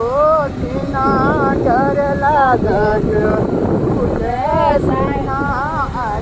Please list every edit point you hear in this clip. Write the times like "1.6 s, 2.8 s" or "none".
none